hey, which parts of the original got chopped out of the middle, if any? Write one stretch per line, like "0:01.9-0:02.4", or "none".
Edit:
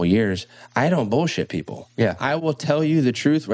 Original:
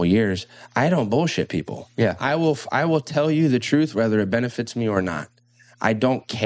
0:02.4-0:02.9